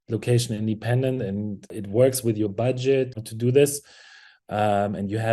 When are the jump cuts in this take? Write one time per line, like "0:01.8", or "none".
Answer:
0:01.7
0:03.1